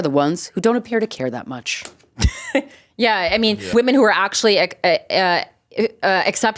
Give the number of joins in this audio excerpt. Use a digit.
1